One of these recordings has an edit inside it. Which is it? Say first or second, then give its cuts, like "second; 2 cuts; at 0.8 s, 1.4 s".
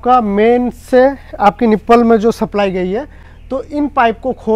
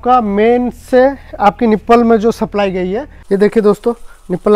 second; 1 cut; at 3.1 s